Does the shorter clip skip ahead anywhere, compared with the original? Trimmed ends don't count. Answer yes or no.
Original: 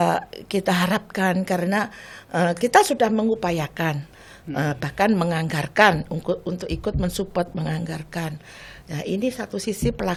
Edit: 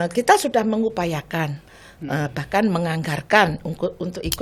no